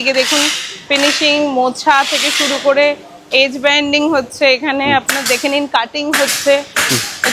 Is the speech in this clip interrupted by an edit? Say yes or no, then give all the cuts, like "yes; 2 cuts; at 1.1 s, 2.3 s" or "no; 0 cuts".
no; 0 cuts